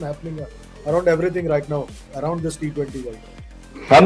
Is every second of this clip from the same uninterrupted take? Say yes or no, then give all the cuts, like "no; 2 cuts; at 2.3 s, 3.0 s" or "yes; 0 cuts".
yes; 0 cuts